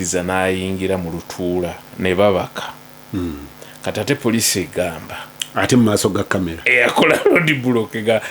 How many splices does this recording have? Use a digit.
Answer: 1